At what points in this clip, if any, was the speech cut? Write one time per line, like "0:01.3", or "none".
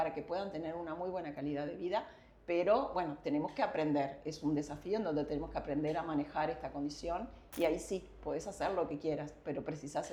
none